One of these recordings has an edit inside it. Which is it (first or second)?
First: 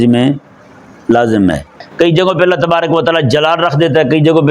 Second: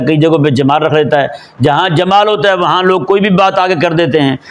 first